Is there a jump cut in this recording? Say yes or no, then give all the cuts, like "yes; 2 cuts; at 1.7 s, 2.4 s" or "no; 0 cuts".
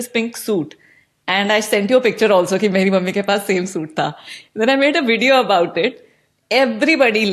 no; 0 cuts